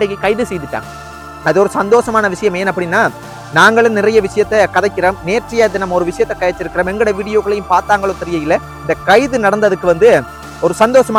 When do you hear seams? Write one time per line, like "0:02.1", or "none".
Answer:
none